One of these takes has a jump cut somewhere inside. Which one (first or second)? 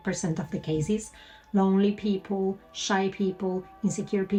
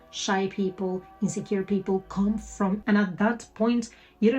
second